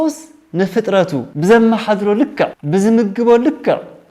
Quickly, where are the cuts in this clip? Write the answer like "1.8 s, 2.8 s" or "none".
1.3 s, 2.6 s